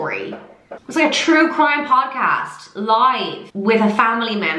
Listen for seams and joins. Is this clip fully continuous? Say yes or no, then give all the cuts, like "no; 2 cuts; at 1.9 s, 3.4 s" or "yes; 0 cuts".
yes; 0 cuts